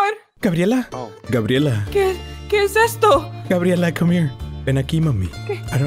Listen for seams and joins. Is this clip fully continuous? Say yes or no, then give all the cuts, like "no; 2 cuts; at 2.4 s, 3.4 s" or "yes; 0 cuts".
yes; 0 cuts